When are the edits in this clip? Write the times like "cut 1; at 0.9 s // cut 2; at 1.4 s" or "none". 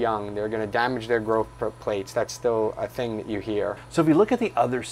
cut 1; at 3.8 s